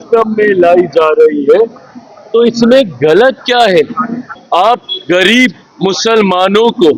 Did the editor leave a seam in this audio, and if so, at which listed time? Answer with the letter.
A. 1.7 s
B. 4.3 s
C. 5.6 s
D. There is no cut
B